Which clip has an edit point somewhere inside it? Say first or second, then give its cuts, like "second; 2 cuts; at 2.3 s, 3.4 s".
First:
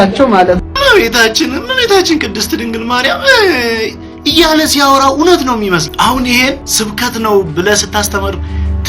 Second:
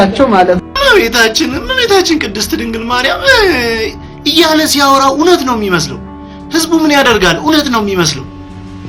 first; 2 cuts; at 5.9 s, 6.7 s